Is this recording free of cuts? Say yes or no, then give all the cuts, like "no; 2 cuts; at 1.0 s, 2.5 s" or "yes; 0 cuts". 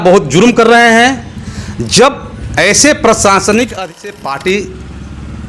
no; 1 cut; at 3.8 s